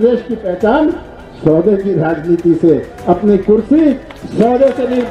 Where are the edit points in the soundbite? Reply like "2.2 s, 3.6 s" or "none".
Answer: none